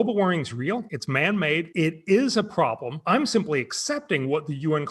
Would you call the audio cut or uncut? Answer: cut